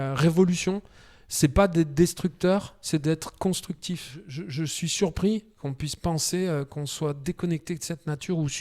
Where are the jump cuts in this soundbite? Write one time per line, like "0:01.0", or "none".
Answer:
0:04.4